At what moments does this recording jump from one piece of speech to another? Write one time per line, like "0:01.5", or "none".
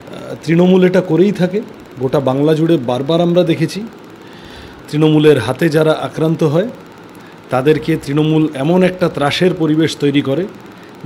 none